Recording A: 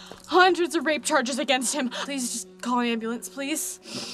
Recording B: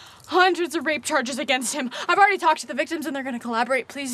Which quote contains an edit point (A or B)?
A